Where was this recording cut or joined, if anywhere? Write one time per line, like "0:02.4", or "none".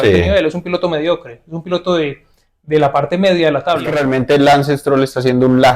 0:03.9